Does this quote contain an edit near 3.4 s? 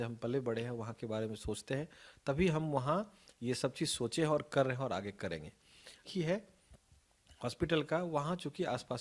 no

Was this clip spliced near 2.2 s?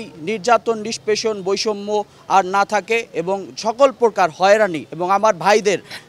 no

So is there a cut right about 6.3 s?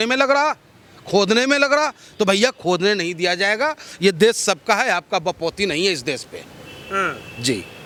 no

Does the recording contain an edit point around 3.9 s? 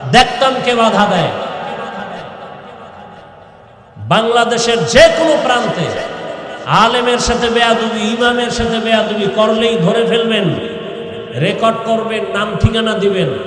yes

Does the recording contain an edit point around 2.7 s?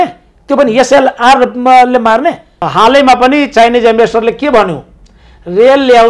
yes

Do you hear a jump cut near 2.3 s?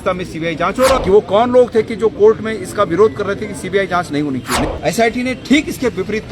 no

